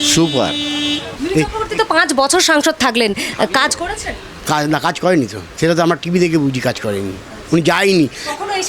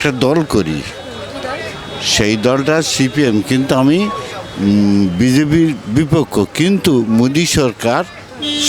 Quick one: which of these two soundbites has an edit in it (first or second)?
first